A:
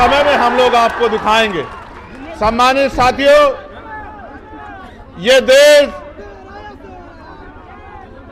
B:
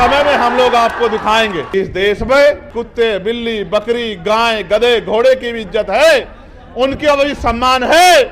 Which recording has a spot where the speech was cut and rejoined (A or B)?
B